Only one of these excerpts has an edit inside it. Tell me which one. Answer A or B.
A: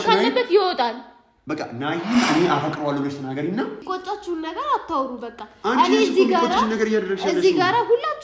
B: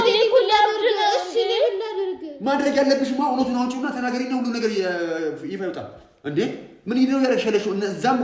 A